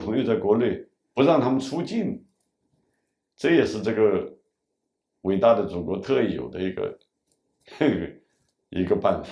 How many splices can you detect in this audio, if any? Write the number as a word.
zero